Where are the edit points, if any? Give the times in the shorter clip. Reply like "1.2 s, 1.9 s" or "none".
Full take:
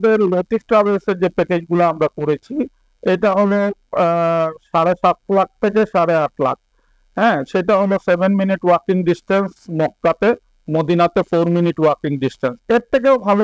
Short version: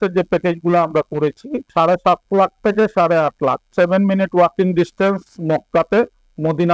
1.6 s, 3.7 s

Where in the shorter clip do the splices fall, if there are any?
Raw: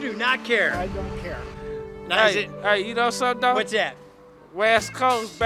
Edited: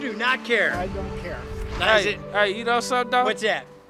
1.5 s

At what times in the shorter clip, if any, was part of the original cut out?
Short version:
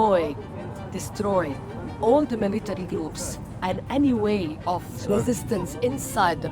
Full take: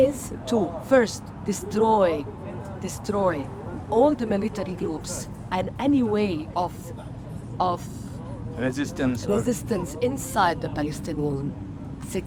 5.0 s

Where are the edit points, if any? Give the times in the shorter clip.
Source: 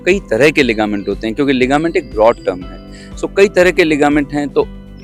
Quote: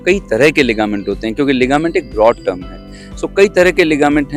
none

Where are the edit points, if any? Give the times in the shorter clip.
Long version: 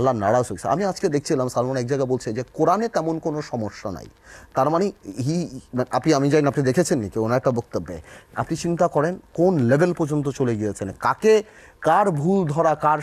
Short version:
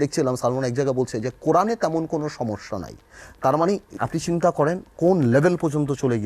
3.9 s

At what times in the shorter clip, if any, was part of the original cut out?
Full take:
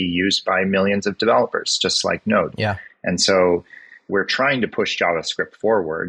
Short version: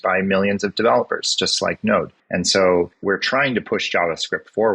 2.1 s, 2.9 s

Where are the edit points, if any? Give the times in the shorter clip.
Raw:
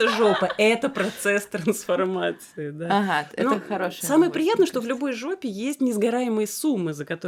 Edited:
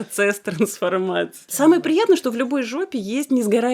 1.5 s

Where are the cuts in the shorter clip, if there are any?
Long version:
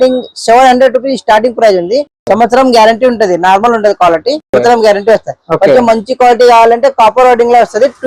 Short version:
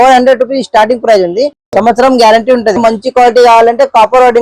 2.8 s

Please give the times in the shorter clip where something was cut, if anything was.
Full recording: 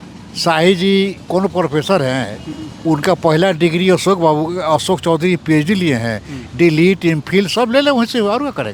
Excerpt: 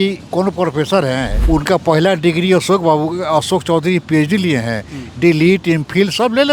1.3 s

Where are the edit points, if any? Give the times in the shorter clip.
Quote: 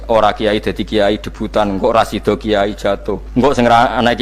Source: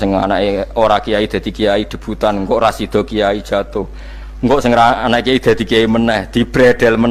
3.2 s

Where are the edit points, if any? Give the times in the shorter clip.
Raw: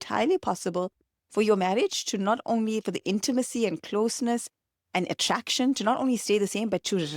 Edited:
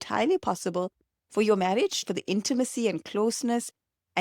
2.0 s

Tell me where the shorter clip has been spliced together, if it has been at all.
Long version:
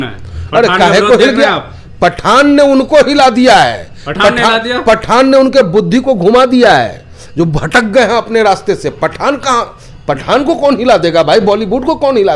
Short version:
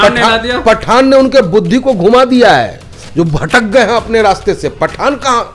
none

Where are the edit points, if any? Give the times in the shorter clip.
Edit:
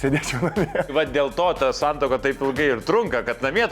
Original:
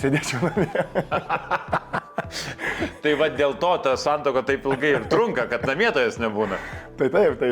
0.9 s

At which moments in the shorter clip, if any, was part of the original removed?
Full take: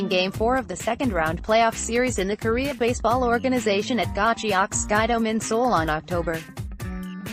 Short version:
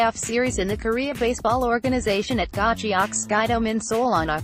none

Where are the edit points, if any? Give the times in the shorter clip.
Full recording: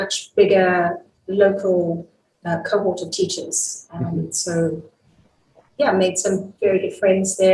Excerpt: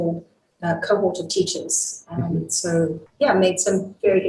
3.0 s

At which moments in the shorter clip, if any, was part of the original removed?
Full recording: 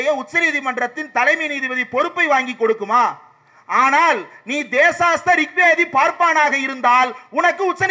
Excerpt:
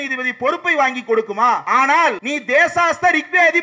1.6 s, 2.3 s

